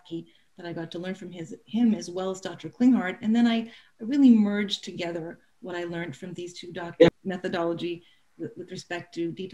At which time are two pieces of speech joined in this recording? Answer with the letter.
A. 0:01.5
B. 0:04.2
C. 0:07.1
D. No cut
C